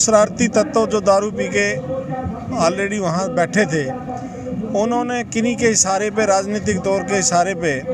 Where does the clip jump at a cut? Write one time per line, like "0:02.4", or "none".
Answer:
none